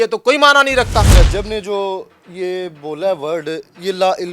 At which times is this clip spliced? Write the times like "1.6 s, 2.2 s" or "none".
1.1 s